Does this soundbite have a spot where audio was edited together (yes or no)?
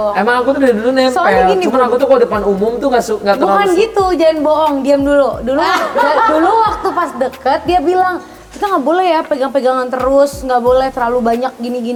no